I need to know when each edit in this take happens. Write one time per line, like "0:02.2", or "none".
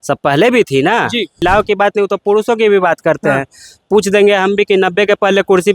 0:01.4